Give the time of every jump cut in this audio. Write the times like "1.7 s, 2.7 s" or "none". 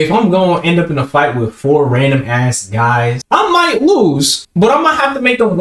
3.2 s, 4.4 s